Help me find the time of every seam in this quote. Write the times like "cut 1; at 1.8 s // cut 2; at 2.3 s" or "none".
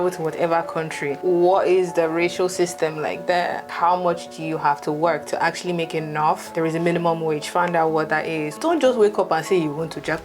cut 1; at 1.1 s // cut 2; at 3.7 s // cut 3; at 8.5 s